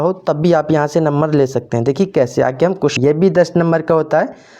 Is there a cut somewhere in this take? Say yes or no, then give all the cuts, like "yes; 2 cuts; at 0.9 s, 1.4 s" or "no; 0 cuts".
yes; 1 cut; at 2.9 s